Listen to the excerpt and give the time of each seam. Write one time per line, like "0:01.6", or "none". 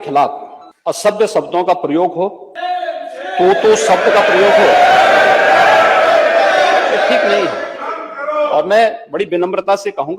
0:01.1
0:02.5